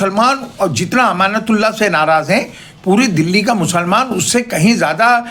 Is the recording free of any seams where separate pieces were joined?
yes; 0 cuts

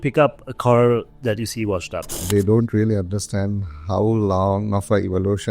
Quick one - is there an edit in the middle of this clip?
yes; 1 cut; at 2.3 s

